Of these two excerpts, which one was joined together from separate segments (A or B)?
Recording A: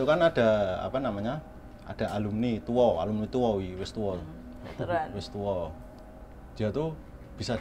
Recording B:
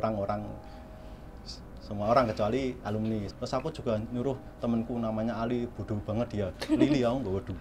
B